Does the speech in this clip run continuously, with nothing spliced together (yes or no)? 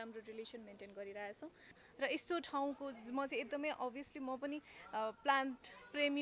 no